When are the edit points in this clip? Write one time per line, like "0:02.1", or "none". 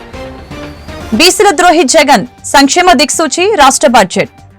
0:01.0

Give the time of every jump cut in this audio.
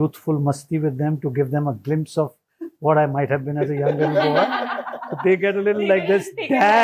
none

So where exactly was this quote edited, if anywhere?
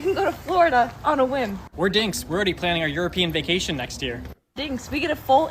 0:01.7
0:04.6

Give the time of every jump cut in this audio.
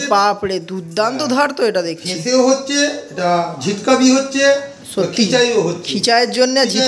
none

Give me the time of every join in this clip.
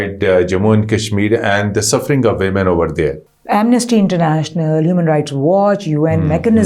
0:03.2

